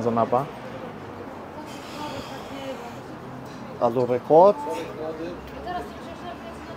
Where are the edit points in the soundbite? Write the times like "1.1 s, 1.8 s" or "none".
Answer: none